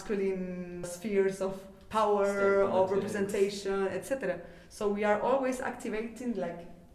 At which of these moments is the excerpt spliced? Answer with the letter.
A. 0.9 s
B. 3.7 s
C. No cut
A